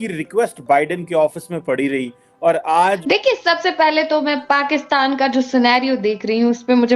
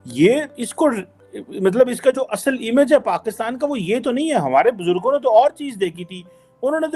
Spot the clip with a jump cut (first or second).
first